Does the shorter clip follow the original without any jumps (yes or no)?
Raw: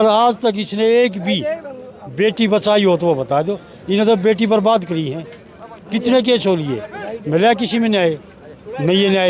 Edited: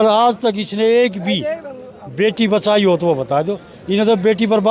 yes